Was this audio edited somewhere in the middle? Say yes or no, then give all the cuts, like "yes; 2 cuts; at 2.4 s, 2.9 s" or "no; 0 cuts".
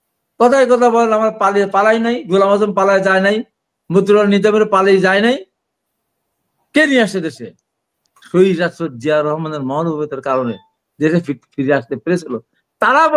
no; 0 cuts